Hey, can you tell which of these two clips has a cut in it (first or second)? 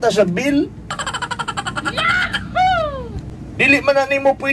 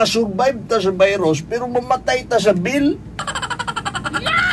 first